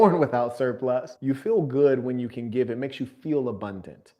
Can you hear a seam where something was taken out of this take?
yes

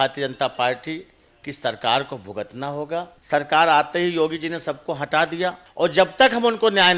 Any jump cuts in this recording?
yes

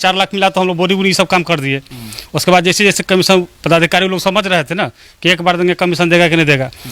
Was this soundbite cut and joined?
no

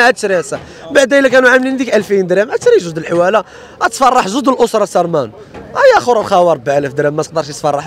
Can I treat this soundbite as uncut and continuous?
yes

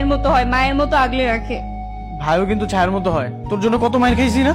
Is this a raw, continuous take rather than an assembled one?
yes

